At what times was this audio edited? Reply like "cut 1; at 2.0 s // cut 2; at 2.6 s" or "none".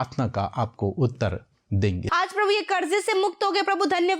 cut 1; at 2.1 s